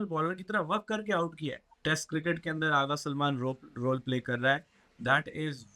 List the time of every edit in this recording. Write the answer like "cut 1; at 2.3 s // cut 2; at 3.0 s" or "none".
cut 1; at 1.8 s